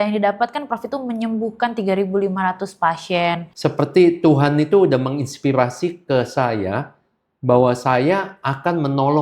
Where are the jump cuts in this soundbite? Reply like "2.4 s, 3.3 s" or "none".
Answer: 3.5 s